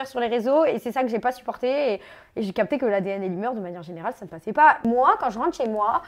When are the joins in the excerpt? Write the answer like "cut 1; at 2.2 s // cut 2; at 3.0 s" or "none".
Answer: cut 1; at 4.8 s